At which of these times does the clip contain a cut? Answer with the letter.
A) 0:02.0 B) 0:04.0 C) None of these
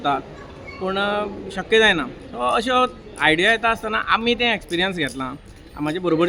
C